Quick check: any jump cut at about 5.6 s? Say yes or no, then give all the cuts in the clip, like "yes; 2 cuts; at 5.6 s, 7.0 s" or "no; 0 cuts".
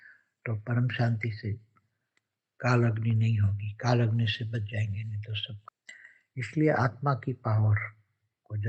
yes; 1 cut; at 5.6 s